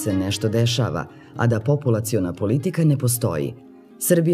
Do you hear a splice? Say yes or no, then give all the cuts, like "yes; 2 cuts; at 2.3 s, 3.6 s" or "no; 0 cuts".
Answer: no; 0 cuts